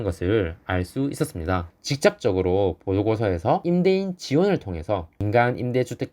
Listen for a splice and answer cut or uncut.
cut